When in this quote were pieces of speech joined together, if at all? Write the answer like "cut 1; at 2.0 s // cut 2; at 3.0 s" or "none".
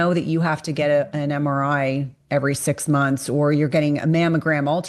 none